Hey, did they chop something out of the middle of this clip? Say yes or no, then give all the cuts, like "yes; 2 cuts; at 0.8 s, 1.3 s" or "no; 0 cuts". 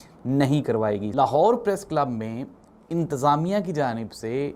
yes; 1 cut; at 1.1 s